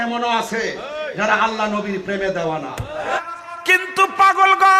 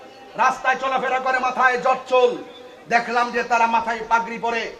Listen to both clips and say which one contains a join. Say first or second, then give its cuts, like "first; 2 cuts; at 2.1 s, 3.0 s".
first; 1 cut; at 3.2 s